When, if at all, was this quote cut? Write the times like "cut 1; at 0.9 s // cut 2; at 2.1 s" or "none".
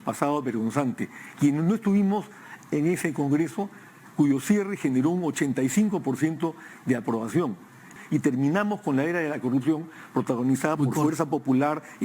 cut 1; at 7.9 s